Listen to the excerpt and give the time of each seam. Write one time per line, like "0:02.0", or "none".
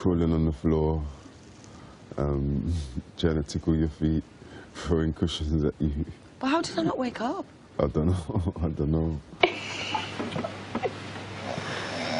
0:04.0

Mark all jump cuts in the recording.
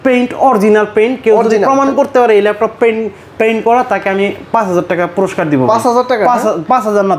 none

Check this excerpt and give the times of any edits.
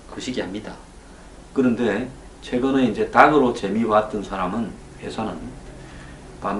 none

